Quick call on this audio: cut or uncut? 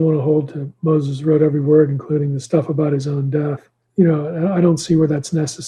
cut